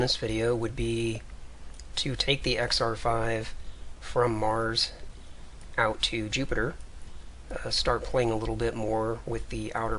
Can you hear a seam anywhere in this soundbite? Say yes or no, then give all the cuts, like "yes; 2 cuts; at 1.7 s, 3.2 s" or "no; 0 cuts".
no; 0 cuts